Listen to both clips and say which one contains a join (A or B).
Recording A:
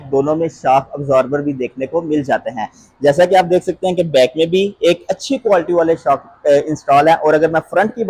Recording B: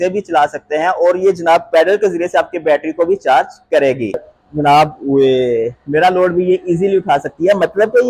B